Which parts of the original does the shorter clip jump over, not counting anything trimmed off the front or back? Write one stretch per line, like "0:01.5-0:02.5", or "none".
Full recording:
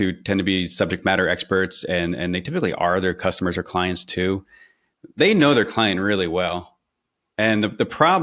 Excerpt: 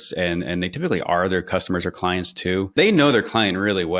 0:04.4-0:05.1